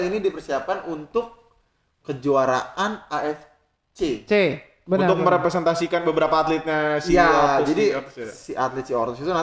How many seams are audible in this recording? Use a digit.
1